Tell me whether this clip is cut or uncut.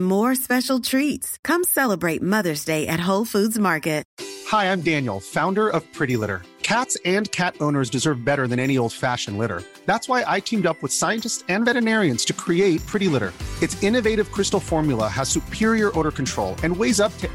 cut